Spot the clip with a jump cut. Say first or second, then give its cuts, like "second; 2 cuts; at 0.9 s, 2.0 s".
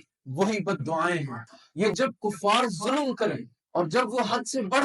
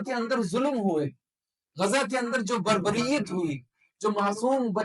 first; 1 cut; at 1.9 s